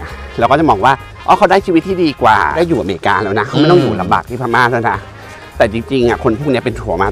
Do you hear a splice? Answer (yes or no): no